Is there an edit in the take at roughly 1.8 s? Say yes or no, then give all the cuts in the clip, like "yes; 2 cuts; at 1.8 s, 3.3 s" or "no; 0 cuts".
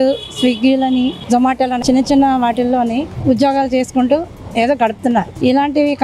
yes; 1 cut; at 1.8 s